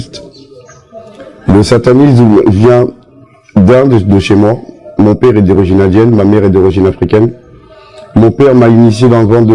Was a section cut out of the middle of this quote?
no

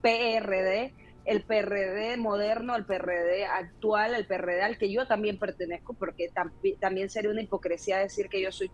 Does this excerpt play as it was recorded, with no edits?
yes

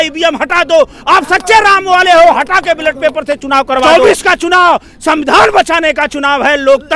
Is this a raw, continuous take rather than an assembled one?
no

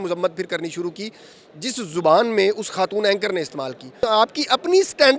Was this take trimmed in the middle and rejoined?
yes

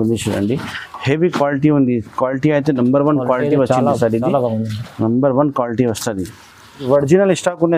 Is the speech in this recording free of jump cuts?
no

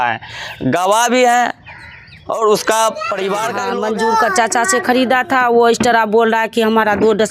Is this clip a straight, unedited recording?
no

